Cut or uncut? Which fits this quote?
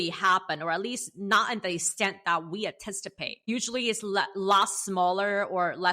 cut